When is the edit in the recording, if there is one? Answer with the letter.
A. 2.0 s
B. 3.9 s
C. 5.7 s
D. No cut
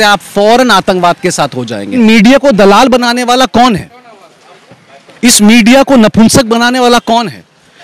A